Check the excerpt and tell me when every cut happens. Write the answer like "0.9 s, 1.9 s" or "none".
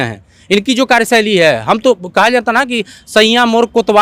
none